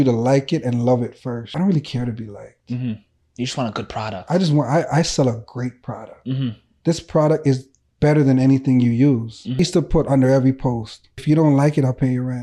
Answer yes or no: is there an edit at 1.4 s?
yes